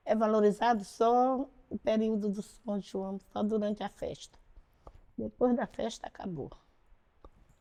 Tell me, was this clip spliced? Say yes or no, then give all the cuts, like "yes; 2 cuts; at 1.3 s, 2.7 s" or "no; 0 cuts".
no; 0 cuts